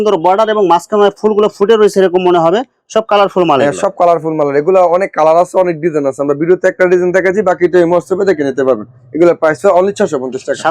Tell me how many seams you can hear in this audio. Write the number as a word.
zero